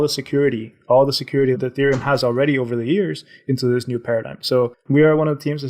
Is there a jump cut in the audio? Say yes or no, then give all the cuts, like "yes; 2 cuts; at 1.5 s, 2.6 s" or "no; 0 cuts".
yes; 1 cut; at 4.8 s